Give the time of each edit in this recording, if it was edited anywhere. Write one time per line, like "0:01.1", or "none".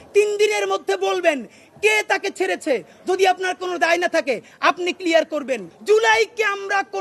0:05.7